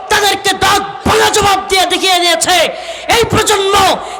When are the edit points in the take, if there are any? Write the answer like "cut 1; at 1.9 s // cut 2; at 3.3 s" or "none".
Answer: none